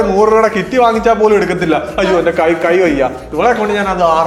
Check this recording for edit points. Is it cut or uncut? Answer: uncut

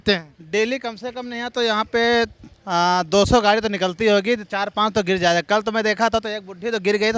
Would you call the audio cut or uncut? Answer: uncut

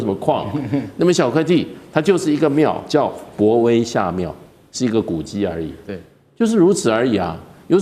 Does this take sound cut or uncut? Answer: uncut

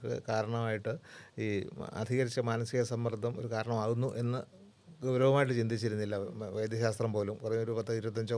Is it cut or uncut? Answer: uncut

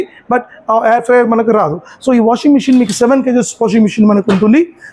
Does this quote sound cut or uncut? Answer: uncut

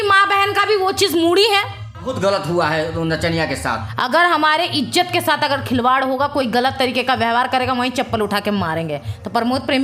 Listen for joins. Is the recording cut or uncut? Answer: cut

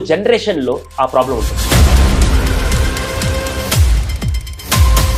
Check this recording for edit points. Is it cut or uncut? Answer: uncut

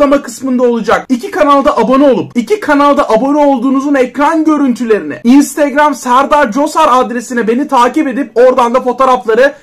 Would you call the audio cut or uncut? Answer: cut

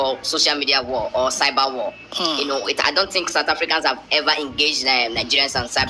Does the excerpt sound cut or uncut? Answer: uncut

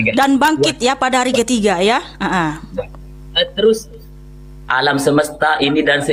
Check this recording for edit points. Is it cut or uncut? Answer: uncut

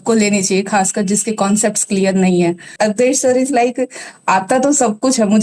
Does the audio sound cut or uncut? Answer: cut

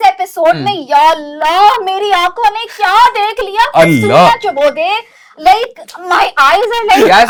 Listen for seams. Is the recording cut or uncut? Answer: uncut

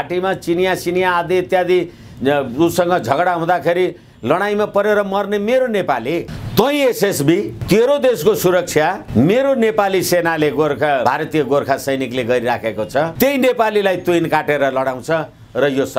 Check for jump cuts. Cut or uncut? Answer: cut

